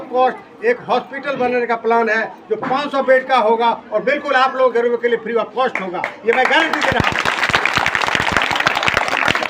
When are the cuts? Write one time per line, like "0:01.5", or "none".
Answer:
none

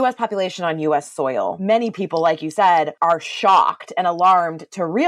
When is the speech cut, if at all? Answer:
0:01.6
0:02.9

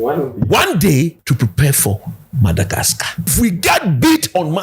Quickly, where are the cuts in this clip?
0:01.2
0:03.3

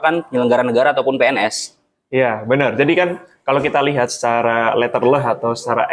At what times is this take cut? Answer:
none

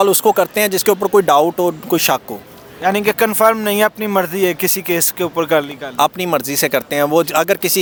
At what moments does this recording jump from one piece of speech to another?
none

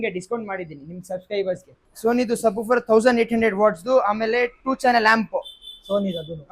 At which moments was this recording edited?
0:01.8

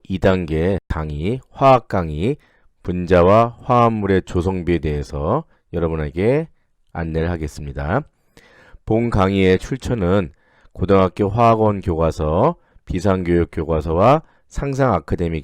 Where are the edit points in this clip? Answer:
0:01.0

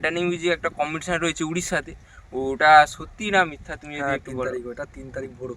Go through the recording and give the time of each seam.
none

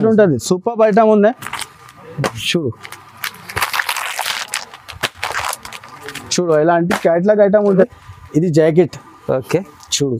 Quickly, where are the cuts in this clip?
0:07.9

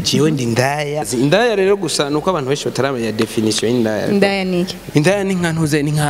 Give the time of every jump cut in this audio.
0:01.1
0:04.8

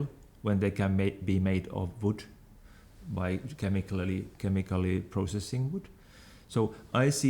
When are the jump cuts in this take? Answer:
none

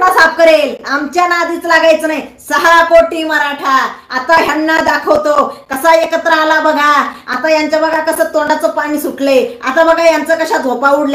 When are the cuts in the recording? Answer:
none

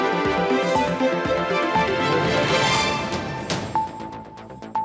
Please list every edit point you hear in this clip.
none

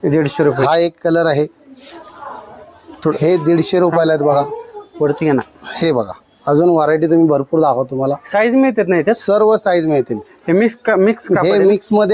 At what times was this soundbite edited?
none

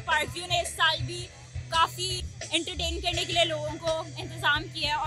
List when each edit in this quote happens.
0:02.1

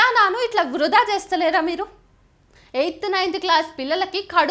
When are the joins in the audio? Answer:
0:02.5

